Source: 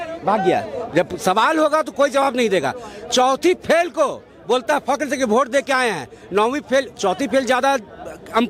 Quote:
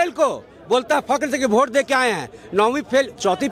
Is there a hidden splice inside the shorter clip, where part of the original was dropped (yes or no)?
no